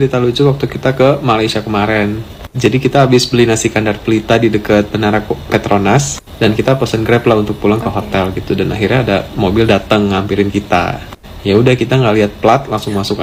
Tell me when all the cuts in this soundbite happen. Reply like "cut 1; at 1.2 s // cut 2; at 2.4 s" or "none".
none